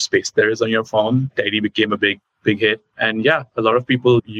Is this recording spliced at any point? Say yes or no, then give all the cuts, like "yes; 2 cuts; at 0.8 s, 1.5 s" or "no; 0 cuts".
no; 0 cuts